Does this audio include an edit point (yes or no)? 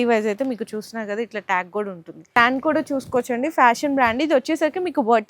yes